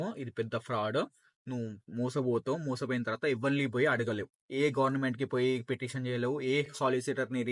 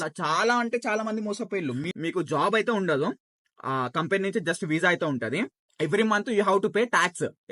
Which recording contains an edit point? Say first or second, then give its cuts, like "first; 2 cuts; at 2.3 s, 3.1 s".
second; 2 cuts; at 1.9 s, 5.5 s